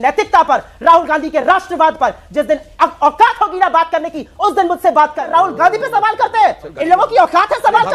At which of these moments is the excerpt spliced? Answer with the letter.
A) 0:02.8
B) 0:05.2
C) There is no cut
B